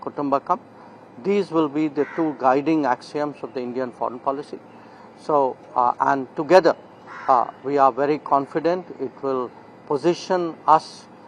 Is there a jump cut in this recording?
no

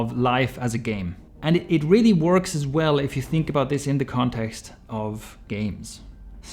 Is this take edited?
no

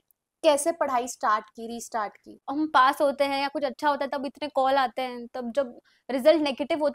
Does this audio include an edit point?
yes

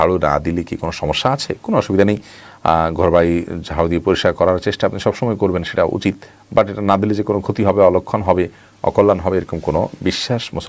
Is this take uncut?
yes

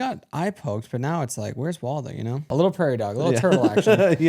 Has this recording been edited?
yes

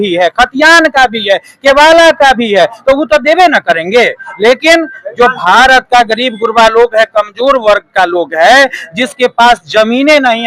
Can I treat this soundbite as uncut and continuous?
yes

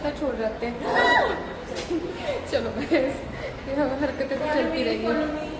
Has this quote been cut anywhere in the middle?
no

